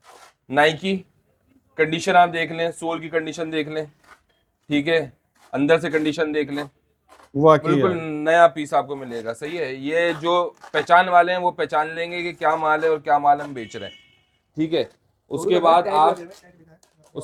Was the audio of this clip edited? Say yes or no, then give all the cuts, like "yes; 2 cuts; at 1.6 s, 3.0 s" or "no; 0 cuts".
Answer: no; 0 cuts